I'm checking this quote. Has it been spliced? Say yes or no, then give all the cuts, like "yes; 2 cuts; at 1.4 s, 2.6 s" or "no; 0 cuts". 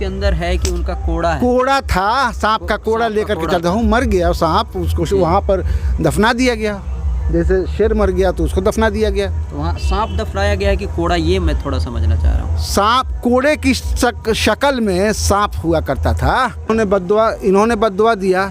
yes; 1 cut; at 16.8 s